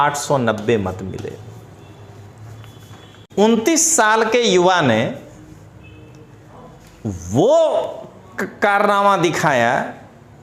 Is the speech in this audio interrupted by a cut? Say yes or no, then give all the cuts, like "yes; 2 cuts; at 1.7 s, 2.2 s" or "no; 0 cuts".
yes; 1 cut; at 3.3 s